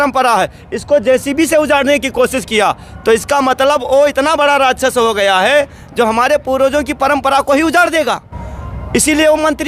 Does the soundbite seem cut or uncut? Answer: uncut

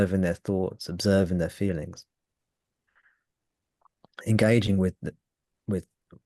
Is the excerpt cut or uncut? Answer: uncut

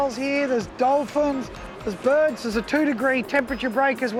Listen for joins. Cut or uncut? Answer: uncut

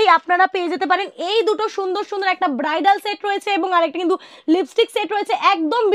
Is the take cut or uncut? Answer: uncut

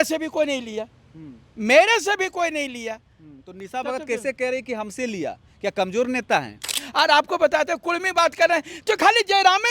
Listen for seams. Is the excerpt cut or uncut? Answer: cut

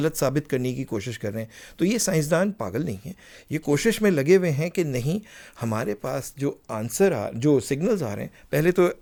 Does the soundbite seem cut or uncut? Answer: uncut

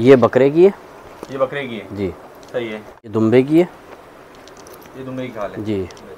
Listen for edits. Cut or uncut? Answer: cut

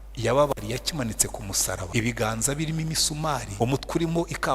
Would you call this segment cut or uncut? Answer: cut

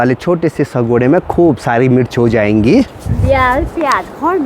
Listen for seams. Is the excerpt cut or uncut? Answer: uncut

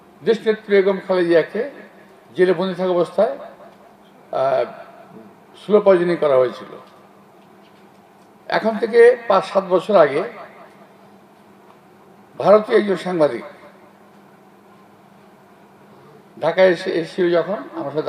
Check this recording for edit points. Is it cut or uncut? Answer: uncut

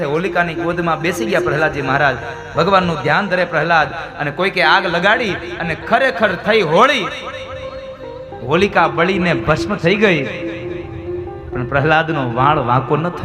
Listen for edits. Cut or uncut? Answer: uncut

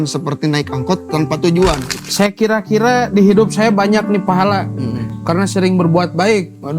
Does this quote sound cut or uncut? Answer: cut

